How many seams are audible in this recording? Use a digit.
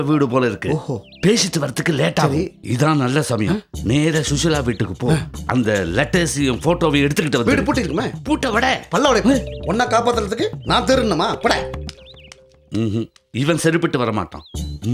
0